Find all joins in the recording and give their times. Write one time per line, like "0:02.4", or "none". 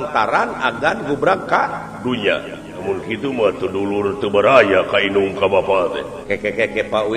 0:02.8
0:06.1